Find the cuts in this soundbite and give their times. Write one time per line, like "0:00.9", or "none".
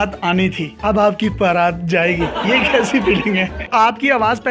0:03.6

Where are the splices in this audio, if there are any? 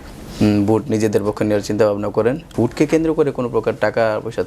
0:02.5

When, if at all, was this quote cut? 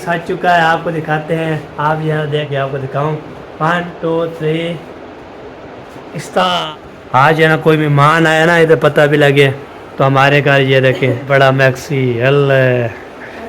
0:02.5
0:06.7
0:11.2

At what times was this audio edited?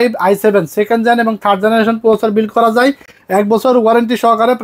none

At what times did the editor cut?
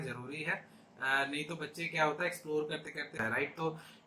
0:03.1

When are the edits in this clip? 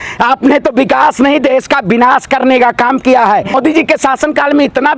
0:03.5

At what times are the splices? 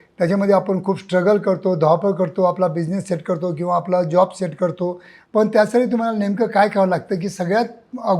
0:05.2

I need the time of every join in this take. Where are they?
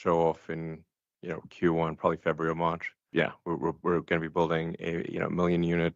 0:02.9

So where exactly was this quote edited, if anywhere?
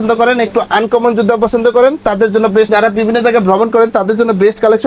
0:02.7

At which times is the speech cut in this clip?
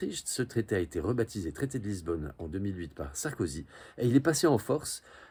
none

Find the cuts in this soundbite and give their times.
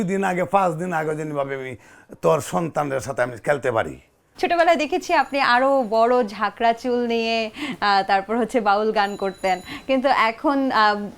none

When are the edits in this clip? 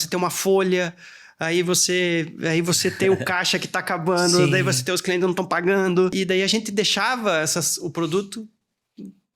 0:06.1

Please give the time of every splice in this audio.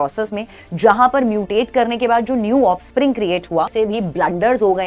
0:03.7

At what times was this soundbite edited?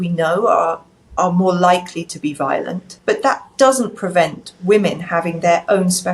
0:02.8

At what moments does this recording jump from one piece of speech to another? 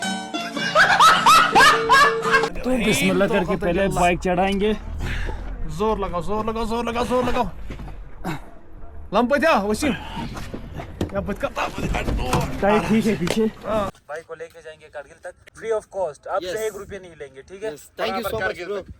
0:02.6
0:14.0
0:15.4

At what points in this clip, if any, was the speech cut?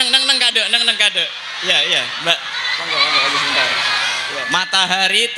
0:04.2

